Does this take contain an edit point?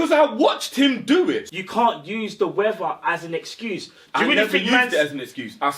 yes; 1 cut; at 1.4 s

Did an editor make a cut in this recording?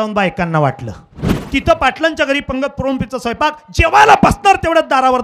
yes; 1 cut; at 1.3 s

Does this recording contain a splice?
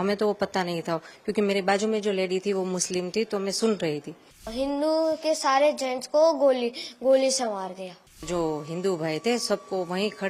yes; 2 cuts; at 4.5 s, 8.2 s

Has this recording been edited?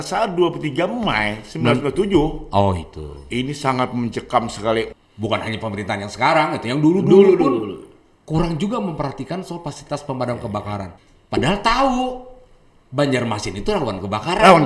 yes; 1 cut; at 4.9 s

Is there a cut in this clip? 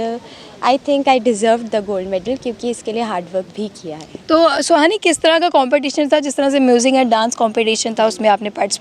no; 0 cuts

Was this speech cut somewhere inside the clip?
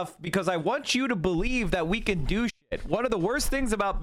no; 0 cuts

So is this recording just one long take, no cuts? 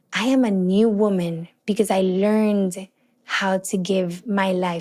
yes; 0 cuts

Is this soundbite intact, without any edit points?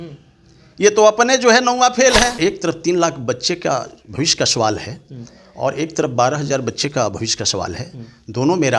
no; 1 cut; at 2.4 s

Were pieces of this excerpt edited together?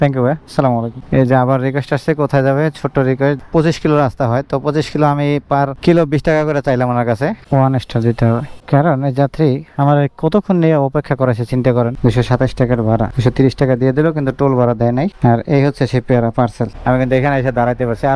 yes; 5 cuts; at 1.0 s, 3.4 s, 7.5 s, 12.0 s, 16.7 s

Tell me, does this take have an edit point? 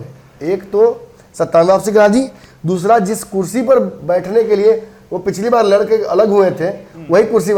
no; 0 cuts

